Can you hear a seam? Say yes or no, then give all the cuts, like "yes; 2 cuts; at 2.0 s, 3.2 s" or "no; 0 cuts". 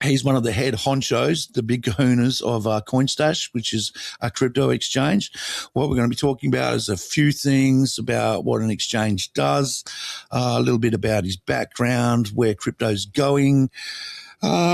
no; 0 cuts